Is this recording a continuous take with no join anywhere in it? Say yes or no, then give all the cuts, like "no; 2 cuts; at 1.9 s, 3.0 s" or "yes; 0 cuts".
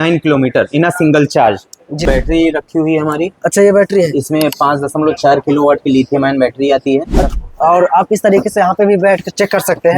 no; 2 cuts; at 2.0 s, 7.2 s